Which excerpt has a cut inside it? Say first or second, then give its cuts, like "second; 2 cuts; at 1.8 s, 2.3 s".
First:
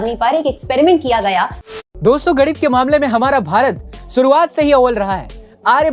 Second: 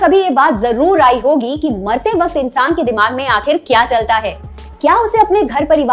first; 1 cut; at 1.6 s